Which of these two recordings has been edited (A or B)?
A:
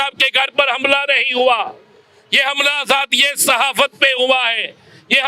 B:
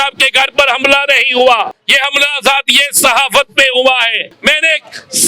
B